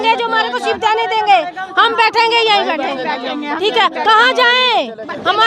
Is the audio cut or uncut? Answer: uncut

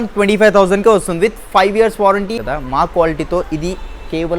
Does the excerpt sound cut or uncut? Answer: cut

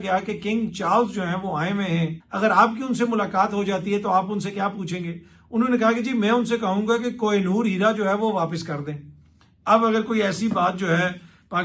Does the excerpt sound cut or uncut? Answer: cut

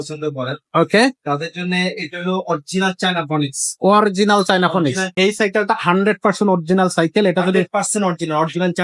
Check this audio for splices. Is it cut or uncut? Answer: cut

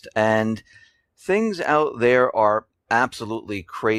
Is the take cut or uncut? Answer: uncut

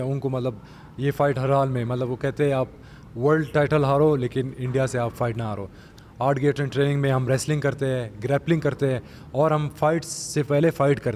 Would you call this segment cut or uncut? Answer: cut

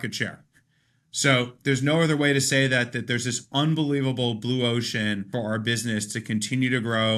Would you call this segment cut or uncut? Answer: cut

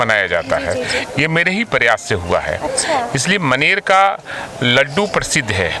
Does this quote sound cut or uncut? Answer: uncut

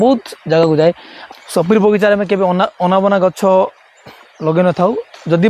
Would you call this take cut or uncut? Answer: cut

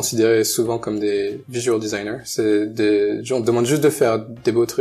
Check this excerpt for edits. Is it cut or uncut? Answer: uncut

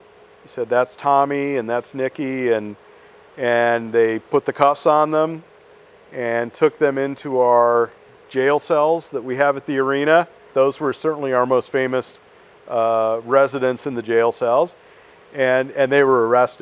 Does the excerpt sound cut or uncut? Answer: cut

